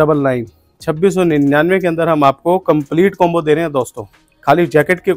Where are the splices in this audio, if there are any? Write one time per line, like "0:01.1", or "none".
none